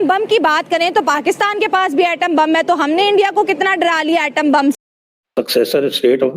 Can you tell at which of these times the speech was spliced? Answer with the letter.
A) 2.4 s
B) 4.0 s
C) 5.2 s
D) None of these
C